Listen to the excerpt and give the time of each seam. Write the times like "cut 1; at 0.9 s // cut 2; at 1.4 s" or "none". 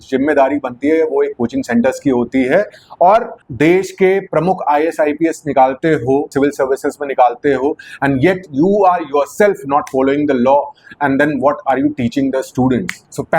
none